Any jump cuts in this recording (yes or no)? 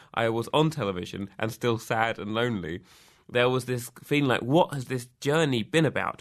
no